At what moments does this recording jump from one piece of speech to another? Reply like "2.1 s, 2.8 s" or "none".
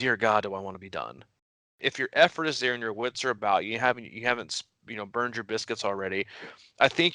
1.5 s